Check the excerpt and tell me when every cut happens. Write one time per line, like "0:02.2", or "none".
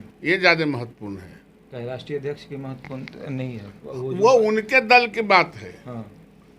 none